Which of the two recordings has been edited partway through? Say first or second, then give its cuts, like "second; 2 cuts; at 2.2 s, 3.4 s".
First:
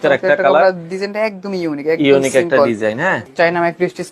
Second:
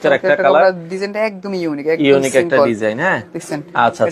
first; 1 cut; at 3.2 s